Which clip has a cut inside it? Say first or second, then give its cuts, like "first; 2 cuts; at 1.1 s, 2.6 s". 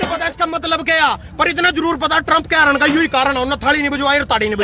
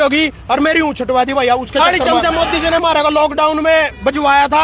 second; 1 cut; at 2.0 s